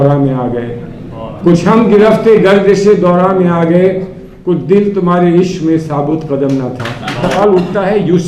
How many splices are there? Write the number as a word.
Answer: one